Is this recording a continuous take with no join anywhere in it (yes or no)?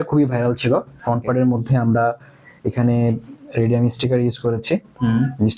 no